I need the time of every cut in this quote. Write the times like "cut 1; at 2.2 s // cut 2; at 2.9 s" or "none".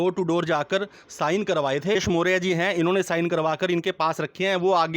cut 1; at 2.0 s

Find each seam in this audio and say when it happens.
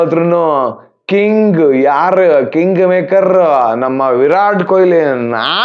none

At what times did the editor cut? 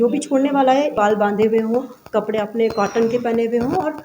cut 1; at 0.9 s

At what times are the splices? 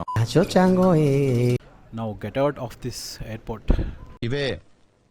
cut 1; at 1.6 s

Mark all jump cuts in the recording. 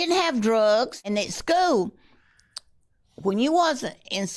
cut 1; at 1.0 s

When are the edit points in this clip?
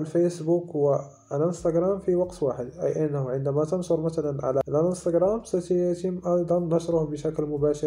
cut 1; at 4.6 s

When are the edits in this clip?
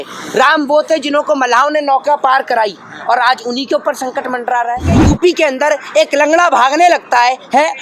cut 1; at 5.0 s

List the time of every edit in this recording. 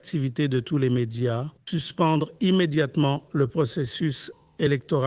cut 1; at 1.5 s

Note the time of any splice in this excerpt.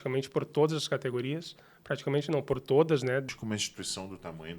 cut 1; at 3.2 s

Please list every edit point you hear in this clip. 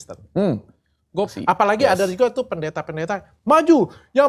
cut 1; at 1.4 s

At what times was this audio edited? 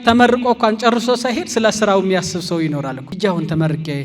cut 1; at 3.0 s

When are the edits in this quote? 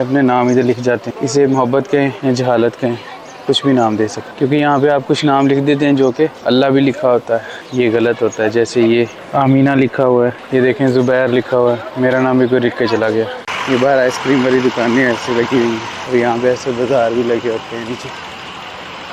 cut 1; at 1.1 s // cut 2; at 2.2 s // cut 3; at 4.2 s // cut 4; at 6.4 s // cut 5; at 7.6 s // cut 6; at 9.2 s // cut 7; at 10.4 s // cut 8; at 13.5 s // cut 9; at 15.9 s

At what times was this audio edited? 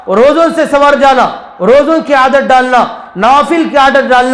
cut 1; at 1.4 s

